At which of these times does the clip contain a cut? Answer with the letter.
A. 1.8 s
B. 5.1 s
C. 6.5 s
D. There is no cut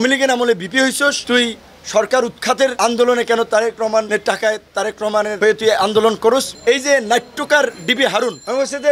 C